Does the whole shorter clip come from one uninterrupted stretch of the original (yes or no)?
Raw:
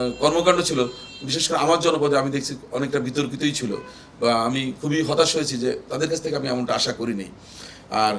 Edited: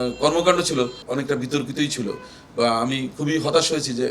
no